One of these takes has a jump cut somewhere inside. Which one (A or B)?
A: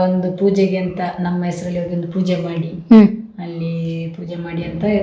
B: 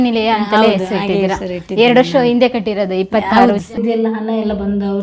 B